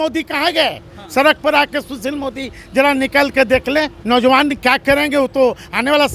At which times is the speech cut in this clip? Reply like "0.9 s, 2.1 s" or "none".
0.9 s, 4.0 s